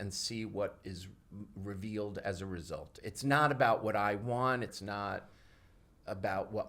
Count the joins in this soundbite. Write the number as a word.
two